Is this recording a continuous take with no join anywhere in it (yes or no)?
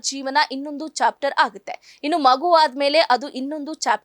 yes